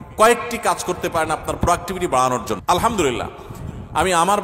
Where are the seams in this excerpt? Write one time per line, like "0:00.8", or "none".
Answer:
0:02.5